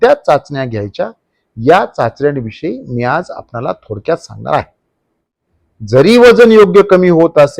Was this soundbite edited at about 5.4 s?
yes; 1 cut; at 5.4 s

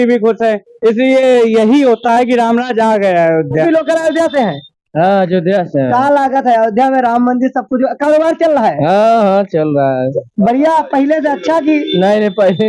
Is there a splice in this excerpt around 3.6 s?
yes; 1 cut; at 3.6 s

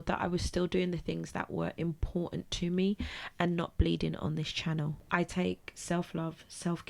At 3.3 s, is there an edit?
no; 1 cut; at 5.0 s

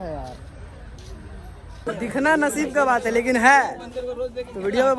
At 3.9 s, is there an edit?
no; 1 cut; at 1.8 s

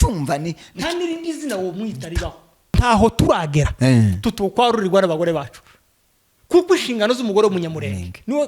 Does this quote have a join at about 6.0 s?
no; 1 cut; at 2.8 s

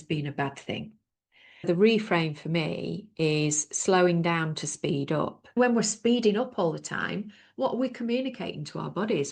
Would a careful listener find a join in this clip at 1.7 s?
yes; 2 cuts; at 1.7 s, 5.5 s

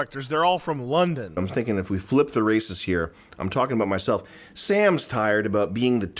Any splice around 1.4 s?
yes; 1 cut; at 1.4 s

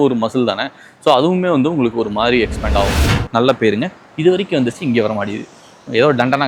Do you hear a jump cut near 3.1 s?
yes; 1 cut; at 3.1 s

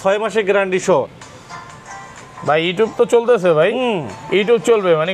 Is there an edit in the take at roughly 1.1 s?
yes; 1 cut; at 1.1 s

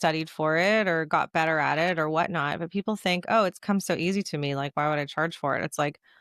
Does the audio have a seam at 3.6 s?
no; 0 cuts

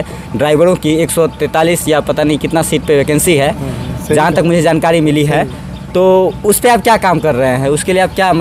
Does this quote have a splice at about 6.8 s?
no; 0 cuts

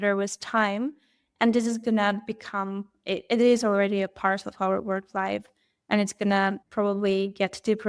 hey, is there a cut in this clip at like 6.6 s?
yes; 1 cut; at 6.6 s

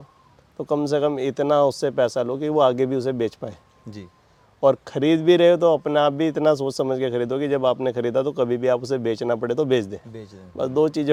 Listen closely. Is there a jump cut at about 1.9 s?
no; 0 cuts

